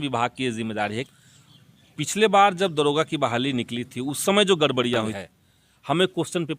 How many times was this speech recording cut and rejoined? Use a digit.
2